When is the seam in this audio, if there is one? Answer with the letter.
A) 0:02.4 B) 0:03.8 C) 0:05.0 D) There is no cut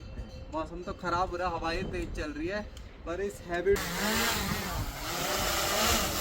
B